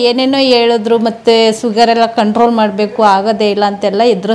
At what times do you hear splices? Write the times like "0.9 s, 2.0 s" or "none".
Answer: none